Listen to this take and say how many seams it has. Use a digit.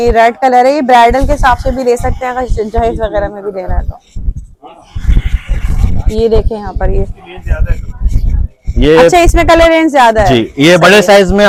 0